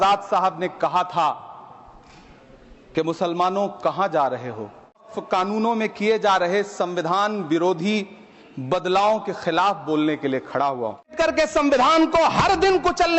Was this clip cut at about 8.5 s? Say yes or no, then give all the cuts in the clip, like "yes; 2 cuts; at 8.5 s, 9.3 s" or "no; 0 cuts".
no; 2 cuts; at 5.1 s, 11.1 s